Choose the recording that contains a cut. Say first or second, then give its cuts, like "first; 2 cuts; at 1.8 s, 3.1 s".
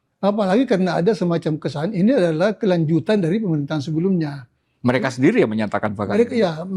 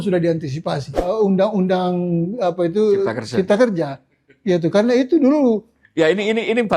second; 1 cut; at 1.1 s